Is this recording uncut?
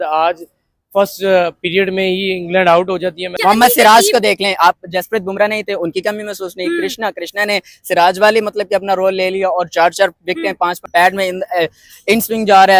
no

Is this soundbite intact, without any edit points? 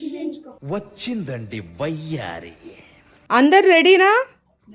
no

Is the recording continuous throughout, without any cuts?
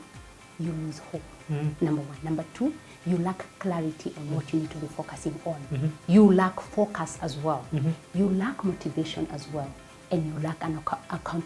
yes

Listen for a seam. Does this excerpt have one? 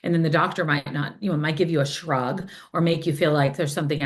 no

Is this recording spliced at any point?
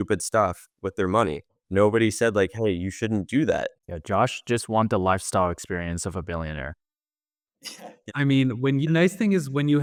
no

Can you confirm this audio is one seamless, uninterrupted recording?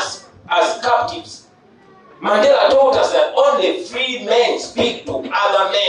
yes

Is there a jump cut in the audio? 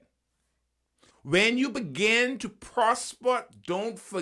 yes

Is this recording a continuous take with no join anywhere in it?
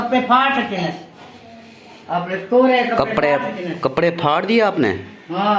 yes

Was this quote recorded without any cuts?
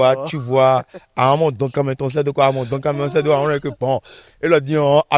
yes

